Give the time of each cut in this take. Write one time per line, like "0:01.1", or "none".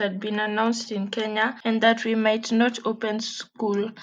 0:01.6